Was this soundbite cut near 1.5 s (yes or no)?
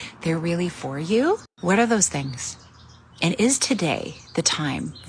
yes